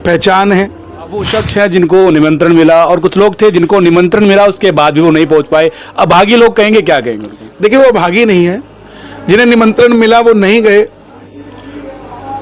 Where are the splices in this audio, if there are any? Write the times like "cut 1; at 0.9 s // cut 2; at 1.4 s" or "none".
cut 1; at 1.4 s